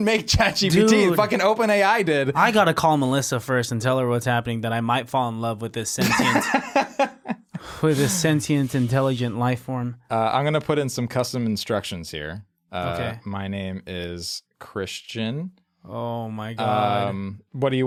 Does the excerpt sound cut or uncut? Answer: uncut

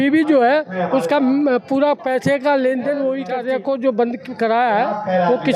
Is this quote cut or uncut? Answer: cut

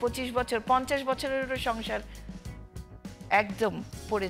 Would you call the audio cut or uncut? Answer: uncut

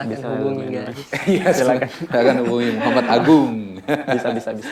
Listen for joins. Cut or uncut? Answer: uncut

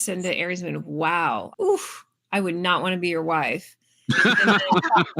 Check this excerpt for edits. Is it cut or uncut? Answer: cut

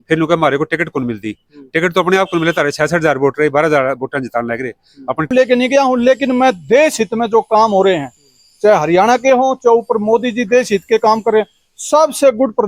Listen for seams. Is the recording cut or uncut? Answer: cut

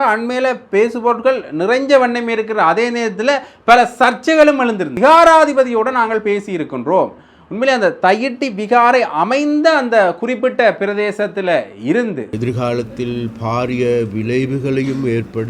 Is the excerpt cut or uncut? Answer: cut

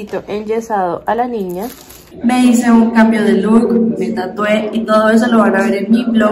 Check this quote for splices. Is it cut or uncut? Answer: cut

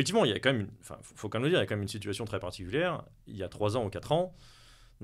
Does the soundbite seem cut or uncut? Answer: uncut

